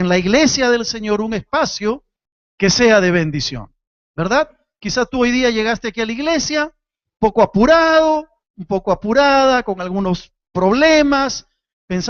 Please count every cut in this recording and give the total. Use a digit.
0